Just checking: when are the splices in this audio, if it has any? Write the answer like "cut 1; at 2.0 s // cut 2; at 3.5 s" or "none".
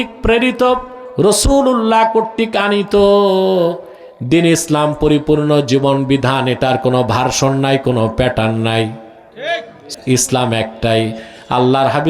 cut 1; at 9.8 s